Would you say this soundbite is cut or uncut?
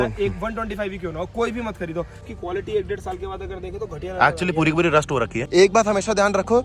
cut